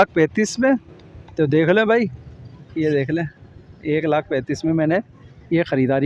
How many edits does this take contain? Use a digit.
0